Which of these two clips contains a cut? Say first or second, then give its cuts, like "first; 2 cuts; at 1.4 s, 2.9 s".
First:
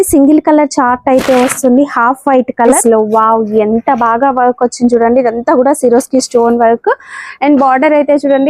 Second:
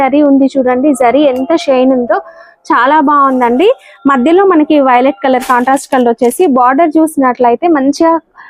first; 1 cut; at 2.8 s